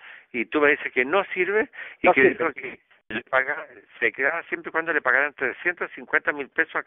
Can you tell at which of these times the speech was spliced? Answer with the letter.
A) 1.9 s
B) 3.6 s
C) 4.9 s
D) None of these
D